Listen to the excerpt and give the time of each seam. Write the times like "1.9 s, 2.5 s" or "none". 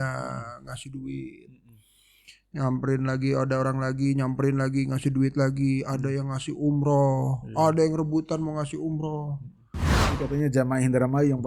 10.0 s